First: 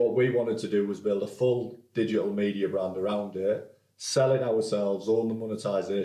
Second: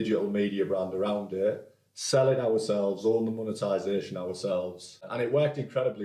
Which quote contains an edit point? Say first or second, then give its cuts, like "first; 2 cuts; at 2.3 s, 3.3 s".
second; 1 cut; at 5.1 s